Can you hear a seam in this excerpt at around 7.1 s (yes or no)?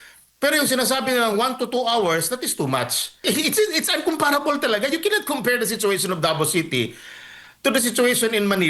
no